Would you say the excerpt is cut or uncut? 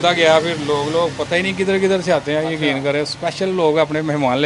uncut